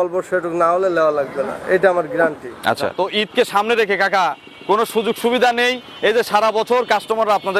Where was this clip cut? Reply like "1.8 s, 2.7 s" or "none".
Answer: 2.9 s